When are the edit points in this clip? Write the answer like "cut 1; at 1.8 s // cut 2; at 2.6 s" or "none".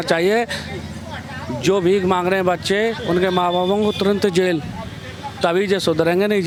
none